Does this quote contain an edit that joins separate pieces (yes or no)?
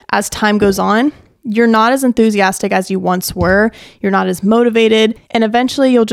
yes